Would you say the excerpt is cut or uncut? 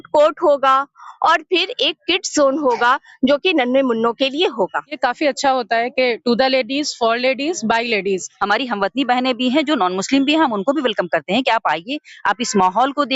cut